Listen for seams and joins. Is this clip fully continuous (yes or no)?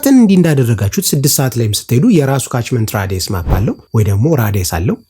no